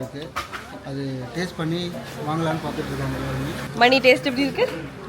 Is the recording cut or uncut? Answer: cut